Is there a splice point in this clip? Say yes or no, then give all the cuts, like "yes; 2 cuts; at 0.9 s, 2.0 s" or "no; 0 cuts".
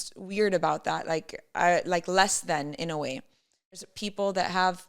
yes; 1 cut; at 3.8 s